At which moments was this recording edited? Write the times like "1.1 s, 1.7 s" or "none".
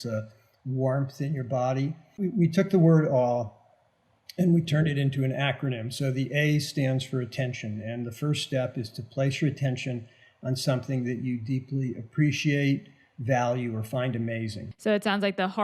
2.1 s, 14.6 s